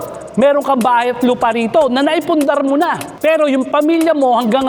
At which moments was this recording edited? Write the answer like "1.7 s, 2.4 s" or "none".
3.1 s